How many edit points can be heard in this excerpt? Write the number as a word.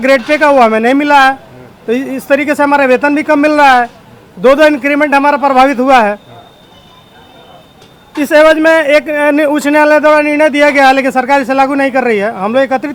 zero